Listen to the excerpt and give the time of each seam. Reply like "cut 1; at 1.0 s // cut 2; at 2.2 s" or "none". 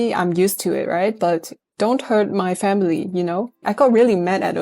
cut 1; at 1.6 s // cut 2; at 3.6 s

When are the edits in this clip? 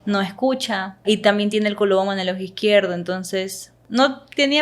cut 1; at 1.0 s // cut 2; at 3.8 s

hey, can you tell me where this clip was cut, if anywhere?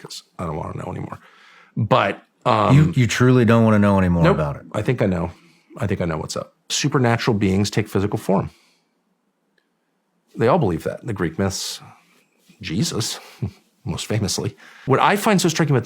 cut 1; at 6.7 s // cut 2; at 14.7 s

